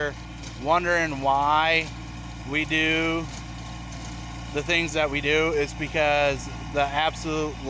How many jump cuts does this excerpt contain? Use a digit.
0